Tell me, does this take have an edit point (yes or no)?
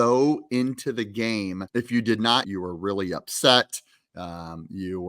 yes